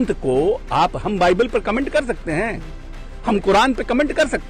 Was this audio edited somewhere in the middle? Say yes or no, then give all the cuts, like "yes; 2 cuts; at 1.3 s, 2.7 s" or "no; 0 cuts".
no; 0 cuts